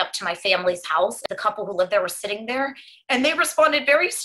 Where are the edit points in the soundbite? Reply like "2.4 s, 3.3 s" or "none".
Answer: 1.2 s